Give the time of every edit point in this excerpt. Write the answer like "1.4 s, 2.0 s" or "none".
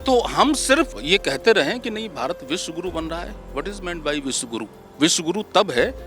1.0 s, 4.8 s